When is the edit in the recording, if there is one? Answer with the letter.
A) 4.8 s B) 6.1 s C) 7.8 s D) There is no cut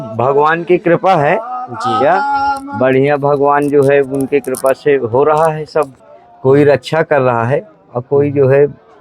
B